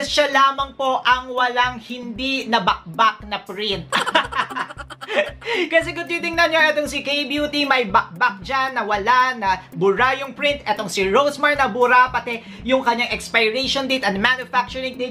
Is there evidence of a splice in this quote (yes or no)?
no